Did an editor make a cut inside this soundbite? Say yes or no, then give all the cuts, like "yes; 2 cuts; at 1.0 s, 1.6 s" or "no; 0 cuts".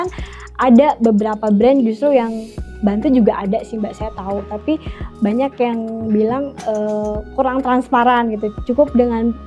no; 0 cuts